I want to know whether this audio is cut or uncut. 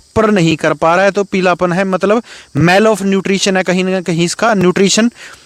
uncut